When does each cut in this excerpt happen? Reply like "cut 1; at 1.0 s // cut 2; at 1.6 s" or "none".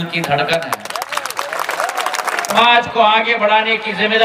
cut 1; at 2.5 s